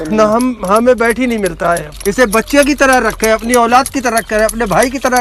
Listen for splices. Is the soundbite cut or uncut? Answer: cut